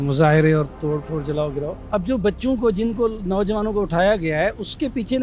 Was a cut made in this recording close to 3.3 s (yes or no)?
no